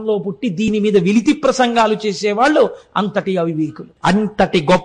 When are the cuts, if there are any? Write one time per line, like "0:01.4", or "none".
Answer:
0:03.8